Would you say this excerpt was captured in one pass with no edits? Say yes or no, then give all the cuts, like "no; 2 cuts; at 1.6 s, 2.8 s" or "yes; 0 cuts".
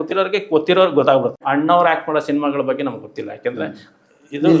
no; 1 cut; at 1.4 s